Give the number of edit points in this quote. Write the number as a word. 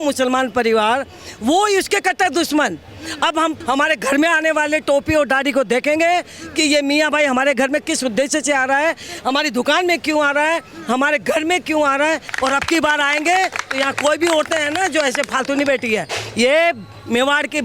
two